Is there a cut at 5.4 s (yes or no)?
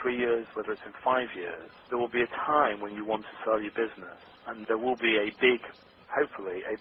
no